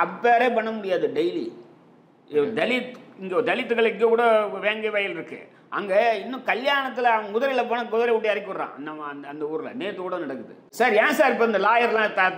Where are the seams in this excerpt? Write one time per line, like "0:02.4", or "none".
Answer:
0:10.6